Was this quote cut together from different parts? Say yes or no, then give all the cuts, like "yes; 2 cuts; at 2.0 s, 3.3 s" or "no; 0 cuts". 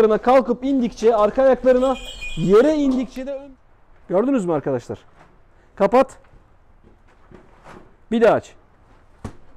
yes; 1 cut; at 3.2 s